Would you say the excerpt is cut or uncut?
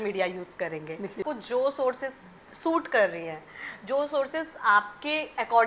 cut